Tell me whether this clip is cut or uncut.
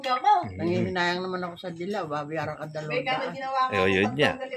uncut